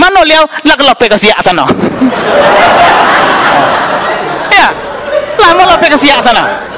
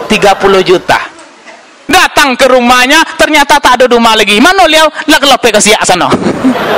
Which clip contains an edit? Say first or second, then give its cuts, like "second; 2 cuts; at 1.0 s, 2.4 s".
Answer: second; 1 cut; at 1.9 s